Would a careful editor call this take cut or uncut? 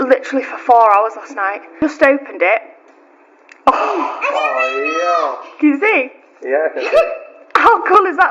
cut